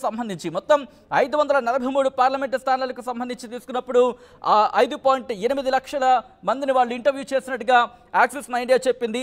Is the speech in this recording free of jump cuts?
yes; 0 cuts

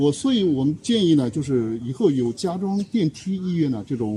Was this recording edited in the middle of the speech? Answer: no; 0 cuts

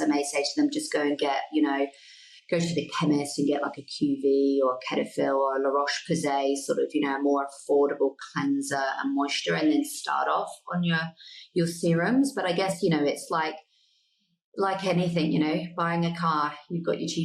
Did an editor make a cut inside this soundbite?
no; 0 cuts

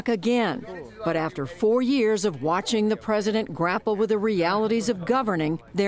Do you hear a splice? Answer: yes; 1 cut; at 2.9 s

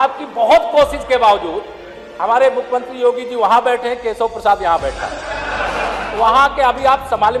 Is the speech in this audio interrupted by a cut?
yes; 1 cut; at 6.0 s

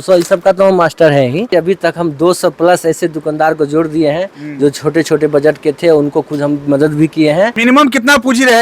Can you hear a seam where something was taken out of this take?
yes; 2 cuts; at 1.5 s, 7.6 s

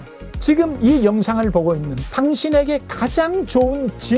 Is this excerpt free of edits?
no; 1 cut; at 2.0 s

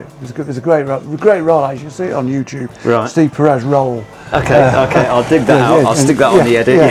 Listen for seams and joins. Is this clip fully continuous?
yes; 0 cuts

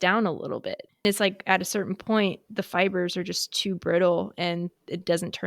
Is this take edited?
yes; 1 cut; at 1.0 s

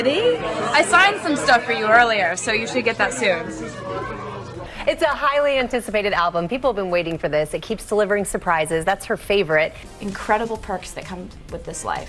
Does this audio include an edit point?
yes; 2 cuts; at 4.7 s, 9.8 s

